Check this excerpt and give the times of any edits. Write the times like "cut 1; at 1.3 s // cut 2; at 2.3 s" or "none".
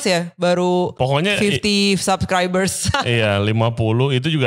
cut 1; at 0.9 s // cut 2; at 2.8 s